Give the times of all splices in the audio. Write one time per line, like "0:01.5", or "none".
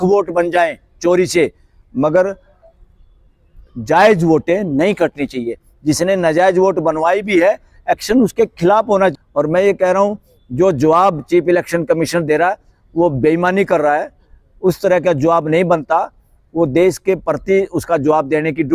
0:09.1